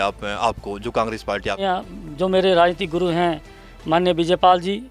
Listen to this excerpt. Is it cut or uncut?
cut